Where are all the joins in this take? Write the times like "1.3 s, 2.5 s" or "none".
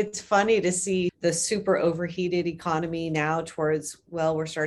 1.1 s

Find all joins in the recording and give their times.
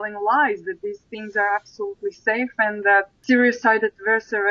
3.2 s

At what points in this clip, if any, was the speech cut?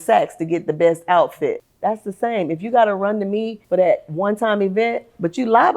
1.7 s, 3.6 s

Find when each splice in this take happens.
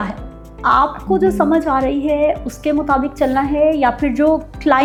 none

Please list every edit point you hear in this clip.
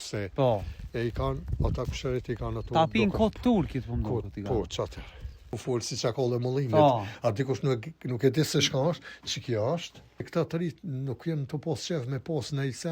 5.5 s, 10.3 s

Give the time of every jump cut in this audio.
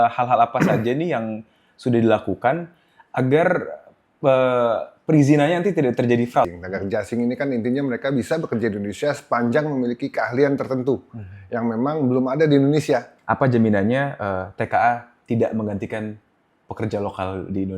6.5 s, 13.1 s

